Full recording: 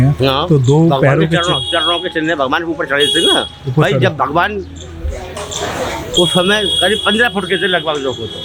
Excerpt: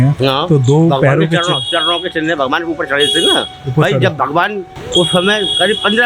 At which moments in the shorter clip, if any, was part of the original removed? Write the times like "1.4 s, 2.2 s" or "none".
4.8 s